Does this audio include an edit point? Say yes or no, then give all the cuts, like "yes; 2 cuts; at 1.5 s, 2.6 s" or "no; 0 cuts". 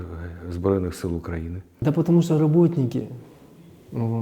yes; 1 cut; at 1.6 s